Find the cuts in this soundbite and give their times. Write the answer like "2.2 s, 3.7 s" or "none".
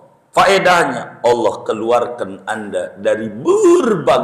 none